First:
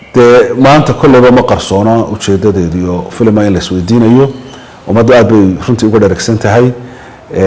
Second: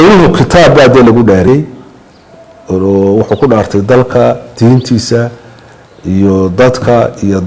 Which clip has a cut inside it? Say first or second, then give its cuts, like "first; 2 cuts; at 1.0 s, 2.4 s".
second; 1 cut; at 1.5 s